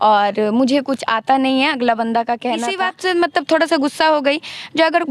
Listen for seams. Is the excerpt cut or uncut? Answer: cut